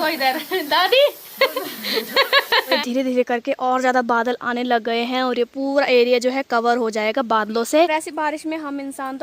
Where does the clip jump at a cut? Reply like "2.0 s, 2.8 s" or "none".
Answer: 2.8 s, 7.9 s

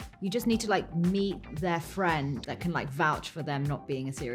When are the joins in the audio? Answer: 2.4 s

